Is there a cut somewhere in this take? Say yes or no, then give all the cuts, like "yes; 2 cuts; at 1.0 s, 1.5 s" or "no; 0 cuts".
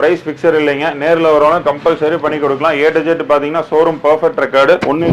no; 0 cuts